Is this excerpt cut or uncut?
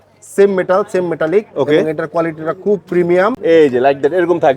cut